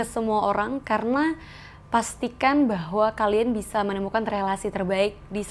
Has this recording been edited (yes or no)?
no